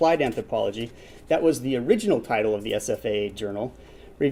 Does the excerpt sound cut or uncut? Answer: uncut